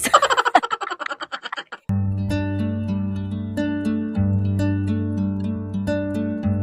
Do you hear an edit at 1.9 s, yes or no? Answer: no